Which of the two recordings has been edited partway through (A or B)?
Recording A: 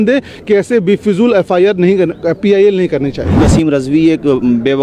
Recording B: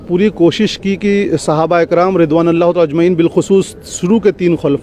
A